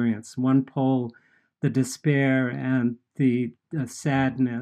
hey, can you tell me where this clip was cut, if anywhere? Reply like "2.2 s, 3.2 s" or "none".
3.6 s